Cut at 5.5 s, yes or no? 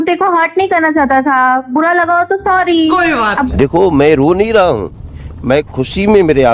no